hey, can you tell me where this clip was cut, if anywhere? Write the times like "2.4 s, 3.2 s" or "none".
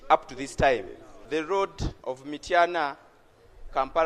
1.2 s, 1.9 s